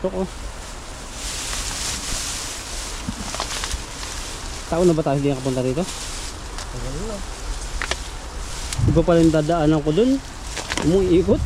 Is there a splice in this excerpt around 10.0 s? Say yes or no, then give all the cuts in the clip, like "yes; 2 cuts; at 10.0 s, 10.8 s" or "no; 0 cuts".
no; 0 cuts